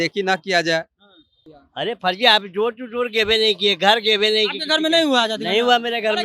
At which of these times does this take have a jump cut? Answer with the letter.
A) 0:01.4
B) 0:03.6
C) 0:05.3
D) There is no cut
A